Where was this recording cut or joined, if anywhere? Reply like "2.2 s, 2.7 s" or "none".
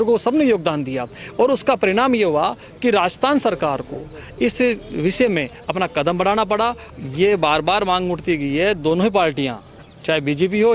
6.9 s